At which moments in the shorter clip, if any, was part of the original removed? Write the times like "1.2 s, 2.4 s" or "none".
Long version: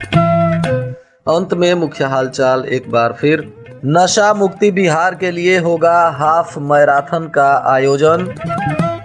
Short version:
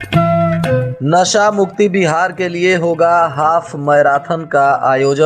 0.9 s

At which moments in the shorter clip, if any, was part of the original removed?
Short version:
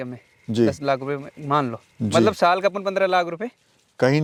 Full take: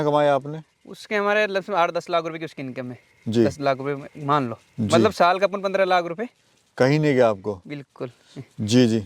none

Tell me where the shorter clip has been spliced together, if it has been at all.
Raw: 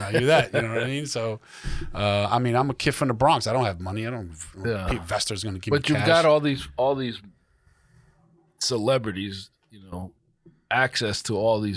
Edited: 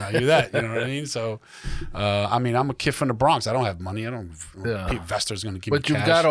none

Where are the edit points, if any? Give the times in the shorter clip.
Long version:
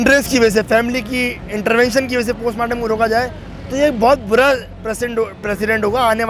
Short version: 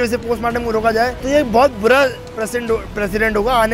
1.2 s

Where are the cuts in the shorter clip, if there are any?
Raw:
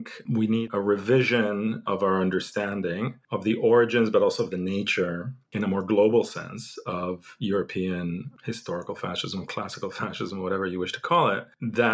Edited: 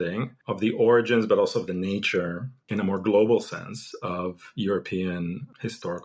none

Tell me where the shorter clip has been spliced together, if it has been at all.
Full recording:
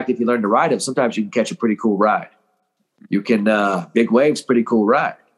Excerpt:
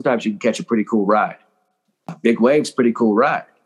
2.1 s

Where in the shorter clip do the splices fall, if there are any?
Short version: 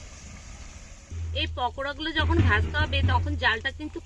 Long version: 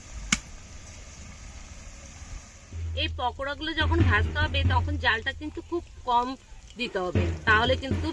1.1 s

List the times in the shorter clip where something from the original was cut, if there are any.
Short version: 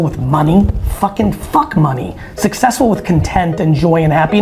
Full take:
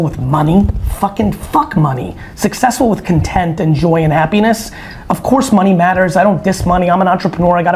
none

